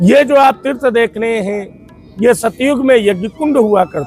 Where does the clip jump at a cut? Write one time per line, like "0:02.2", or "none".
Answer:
none